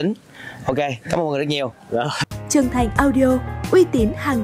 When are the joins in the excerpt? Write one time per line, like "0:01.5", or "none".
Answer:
0:02.2